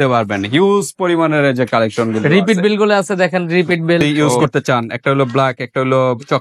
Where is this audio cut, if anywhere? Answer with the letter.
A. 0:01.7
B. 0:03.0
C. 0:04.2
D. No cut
C